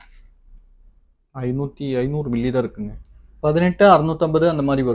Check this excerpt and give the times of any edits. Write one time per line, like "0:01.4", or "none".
0:03.2